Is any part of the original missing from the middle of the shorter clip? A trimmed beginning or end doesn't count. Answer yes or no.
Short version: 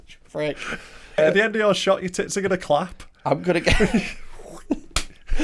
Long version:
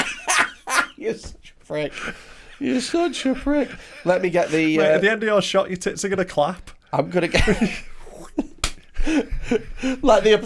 yes